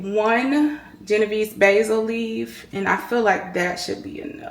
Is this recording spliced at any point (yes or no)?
no